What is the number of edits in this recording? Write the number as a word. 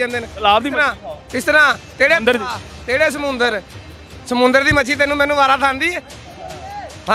zero